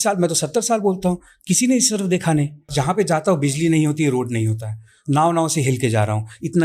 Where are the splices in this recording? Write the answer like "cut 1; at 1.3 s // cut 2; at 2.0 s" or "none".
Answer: cut 1; at 2.7 s